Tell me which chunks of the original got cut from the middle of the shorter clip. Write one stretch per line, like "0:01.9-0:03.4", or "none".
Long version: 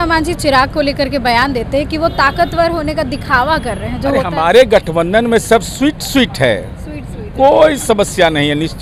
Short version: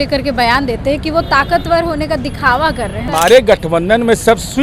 0:03.9-0:04.3